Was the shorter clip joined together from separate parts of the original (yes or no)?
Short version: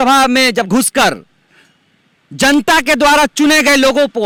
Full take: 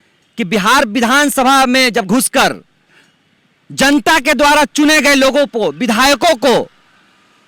no